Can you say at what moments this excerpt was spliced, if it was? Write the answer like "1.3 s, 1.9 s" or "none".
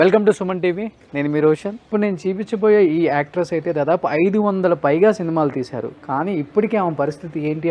1.8 s